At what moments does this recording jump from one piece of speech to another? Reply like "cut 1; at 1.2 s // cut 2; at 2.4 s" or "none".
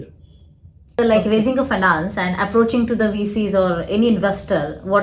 cut 1; at 1.0 s

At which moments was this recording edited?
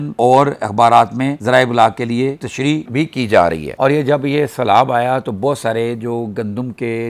cut 1; at 3.7 s

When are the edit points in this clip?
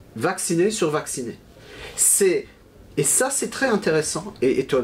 none

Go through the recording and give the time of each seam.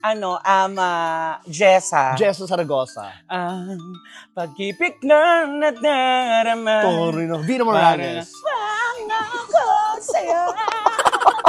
none

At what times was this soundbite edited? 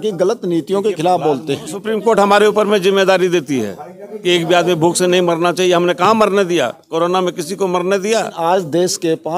cut 1; at 1.8 s // cut 2; at 8.4 s

